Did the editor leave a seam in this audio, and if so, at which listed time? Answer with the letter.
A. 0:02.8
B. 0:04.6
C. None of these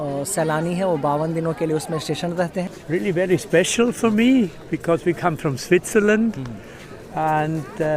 A